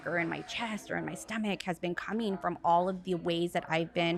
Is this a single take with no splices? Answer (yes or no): yes